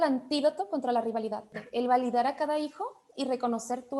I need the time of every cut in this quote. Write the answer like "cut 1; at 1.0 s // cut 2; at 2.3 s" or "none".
cut 1; at 1.6 s